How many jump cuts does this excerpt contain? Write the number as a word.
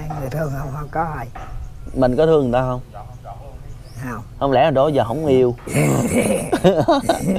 zero